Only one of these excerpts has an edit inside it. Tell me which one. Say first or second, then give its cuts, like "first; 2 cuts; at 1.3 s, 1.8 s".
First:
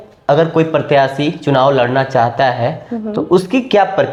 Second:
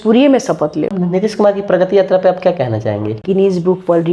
second; 2 cuts; at 0.9 s, 3.2 s